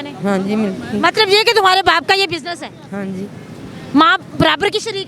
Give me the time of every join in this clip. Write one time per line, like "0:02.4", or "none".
none